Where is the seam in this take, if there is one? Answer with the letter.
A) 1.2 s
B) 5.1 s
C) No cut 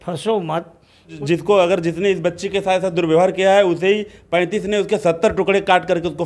A